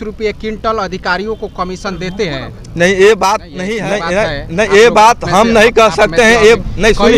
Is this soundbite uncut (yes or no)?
no